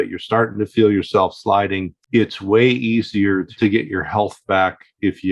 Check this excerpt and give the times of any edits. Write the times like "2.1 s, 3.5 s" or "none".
1.9 s, 3.5 s